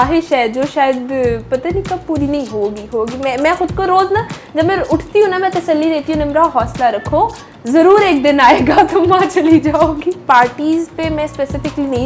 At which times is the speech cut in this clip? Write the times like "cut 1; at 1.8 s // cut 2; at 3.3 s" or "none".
cut 1; at 10.2 s